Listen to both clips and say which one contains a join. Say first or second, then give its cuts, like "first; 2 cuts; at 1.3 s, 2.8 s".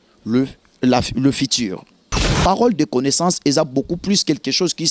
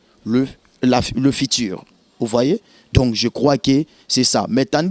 first; 1 cut; at 2.3 s